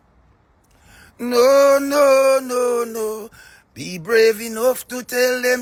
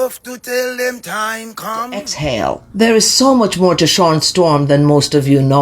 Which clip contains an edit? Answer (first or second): second